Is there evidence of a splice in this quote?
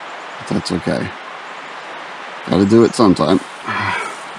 no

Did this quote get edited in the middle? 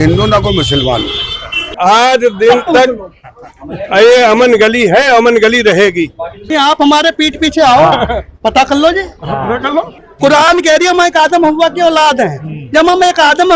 yes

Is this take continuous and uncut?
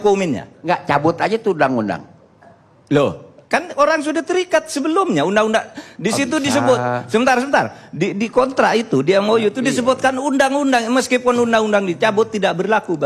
yes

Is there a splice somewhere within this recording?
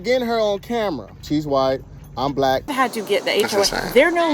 yes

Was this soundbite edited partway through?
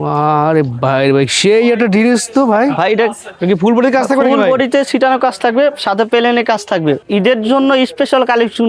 yes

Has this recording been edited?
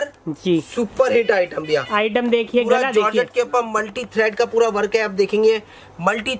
no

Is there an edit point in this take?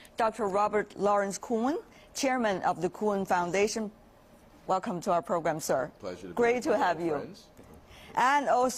yes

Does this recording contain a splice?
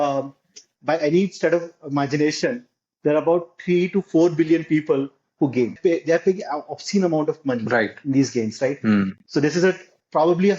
yes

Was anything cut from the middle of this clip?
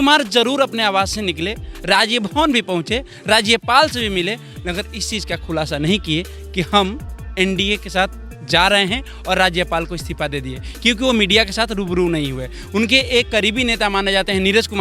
no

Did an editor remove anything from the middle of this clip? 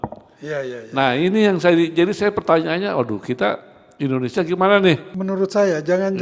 yes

